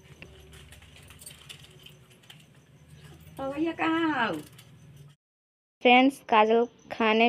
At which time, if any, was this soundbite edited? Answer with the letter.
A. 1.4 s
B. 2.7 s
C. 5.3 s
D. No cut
C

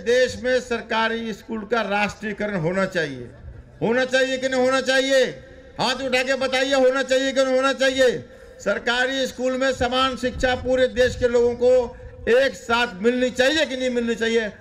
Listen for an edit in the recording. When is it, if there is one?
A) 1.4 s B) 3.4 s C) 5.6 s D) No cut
D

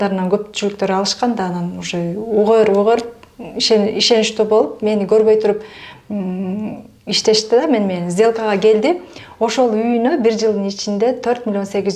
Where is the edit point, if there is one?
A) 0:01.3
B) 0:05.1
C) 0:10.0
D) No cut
D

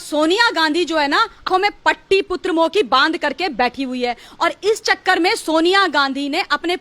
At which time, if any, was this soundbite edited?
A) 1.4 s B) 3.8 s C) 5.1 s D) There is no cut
A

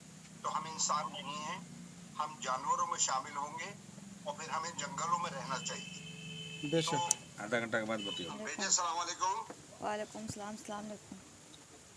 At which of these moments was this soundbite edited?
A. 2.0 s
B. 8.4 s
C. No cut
B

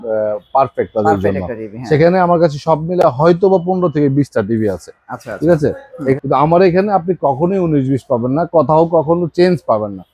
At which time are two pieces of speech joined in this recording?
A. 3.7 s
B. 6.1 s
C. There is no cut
B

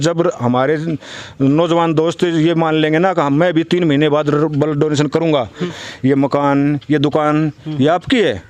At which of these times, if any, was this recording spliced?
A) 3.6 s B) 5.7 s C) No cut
B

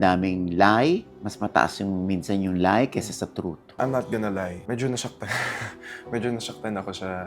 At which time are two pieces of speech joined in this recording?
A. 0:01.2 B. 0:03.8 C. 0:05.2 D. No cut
B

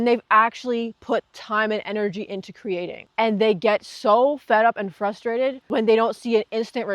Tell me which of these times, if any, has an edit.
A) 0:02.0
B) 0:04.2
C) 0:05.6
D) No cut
C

